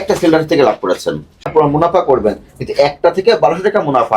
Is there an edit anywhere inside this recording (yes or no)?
yes